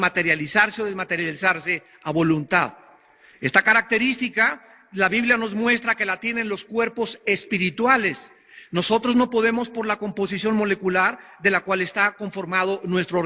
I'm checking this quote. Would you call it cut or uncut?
cut